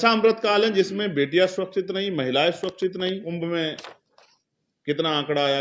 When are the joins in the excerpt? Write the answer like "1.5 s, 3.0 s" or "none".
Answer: 3.2 s

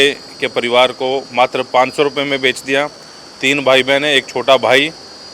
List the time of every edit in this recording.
none

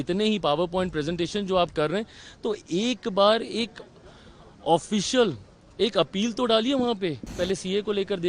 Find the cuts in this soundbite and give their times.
7.4 s

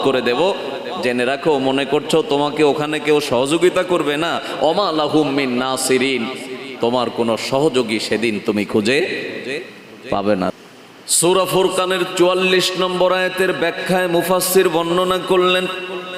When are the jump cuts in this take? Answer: 10.6 s

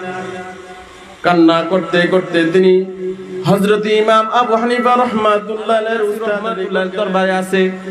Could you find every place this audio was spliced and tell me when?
6.5 s

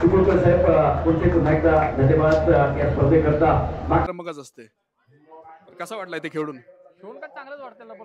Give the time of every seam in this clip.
4.0 s

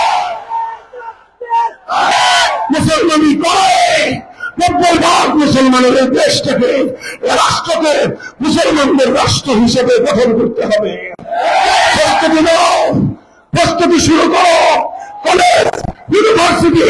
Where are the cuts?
2.1 s

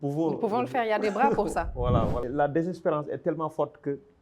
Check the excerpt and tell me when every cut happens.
2.2 s

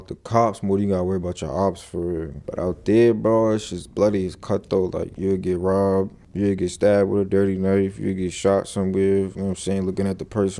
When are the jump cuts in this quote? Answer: 2.4 s, 5.1 s, 9.3 s

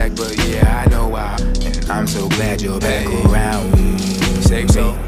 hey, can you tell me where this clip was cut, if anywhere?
none

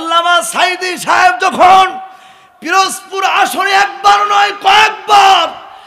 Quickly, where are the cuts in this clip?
none

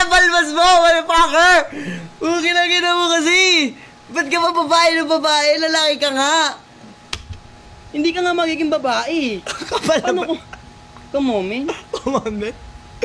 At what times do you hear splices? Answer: none

